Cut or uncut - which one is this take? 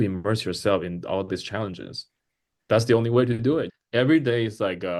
cut